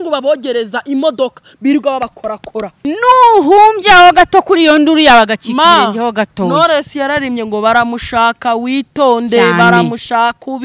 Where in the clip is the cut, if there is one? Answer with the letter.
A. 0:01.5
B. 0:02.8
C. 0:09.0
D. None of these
B